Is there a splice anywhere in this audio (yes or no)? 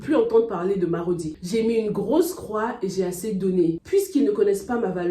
yes